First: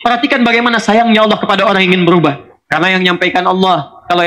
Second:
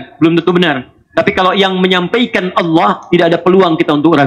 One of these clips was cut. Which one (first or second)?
first